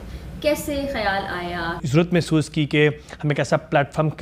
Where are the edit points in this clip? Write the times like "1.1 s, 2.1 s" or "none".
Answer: 1.8 s